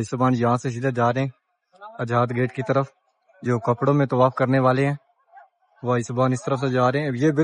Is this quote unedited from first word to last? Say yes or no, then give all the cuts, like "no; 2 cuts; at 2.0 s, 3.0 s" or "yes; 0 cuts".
yes; 0 cuts